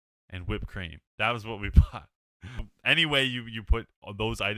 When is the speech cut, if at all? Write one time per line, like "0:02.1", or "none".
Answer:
0:02.7